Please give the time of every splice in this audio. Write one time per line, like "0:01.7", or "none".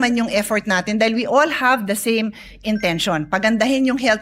none